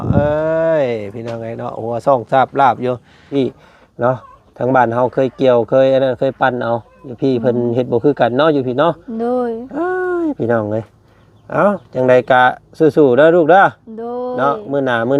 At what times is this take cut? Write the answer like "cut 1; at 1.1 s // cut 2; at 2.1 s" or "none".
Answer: cut 1; at 3.3 s